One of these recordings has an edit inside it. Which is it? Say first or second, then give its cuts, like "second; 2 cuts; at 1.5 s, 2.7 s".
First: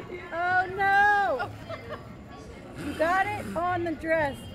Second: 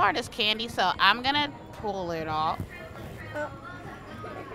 first; 1 cut; at 1.6 s